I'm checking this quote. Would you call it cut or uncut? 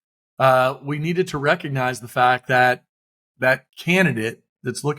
cut